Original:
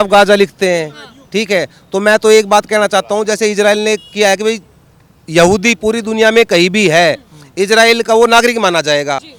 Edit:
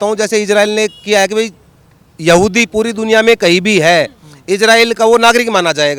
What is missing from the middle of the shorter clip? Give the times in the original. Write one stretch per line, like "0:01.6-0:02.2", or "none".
none

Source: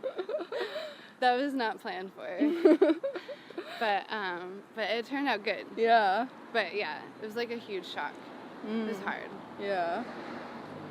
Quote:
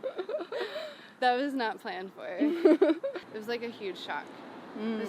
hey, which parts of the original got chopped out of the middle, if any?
0:03.2-0:07.1

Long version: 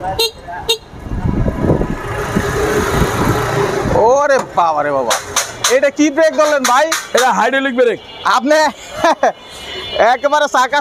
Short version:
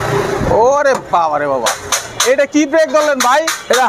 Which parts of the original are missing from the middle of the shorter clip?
none

